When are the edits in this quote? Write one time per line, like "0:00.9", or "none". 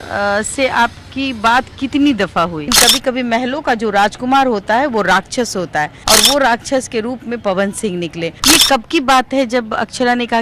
0:02.7
0:06.0
0:08.3